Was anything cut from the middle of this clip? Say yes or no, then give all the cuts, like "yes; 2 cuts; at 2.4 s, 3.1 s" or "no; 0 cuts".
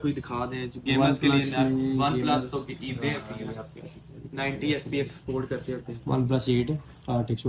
no; 0 cuts